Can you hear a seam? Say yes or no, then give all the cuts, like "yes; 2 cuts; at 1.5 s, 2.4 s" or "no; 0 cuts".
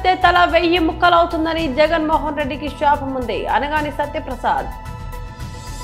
yes; 1 cut; at 4.7 s